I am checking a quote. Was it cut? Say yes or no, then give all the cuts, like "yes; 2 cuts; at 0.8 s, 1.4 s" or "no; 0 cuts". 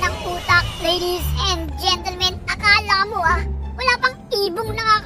no; 0 cuts